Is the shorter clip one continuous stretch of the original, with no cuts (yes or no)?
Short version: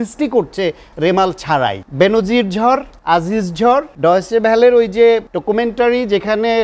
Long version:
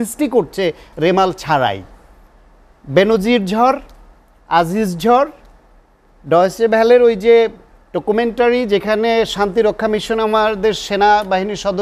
no